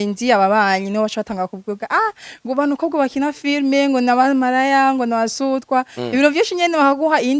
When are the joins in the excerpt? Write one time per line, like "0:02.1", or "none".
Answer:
none

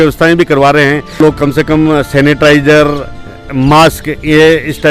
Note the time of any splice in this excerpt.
0:01.2

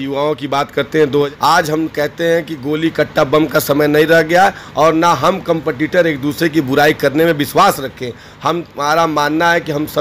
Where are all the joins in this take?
0:01.3

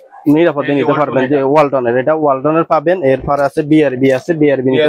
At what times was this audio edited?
none

